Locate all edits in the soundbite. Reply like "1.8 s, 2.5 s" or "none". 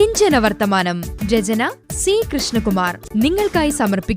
3.0 s